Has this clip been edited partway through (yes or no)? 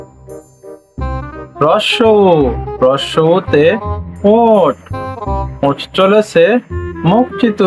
no